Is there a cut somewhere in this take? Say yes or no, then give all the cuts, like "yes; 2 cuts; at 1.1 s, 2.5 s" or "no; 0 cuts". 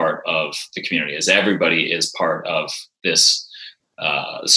no; 0 cuts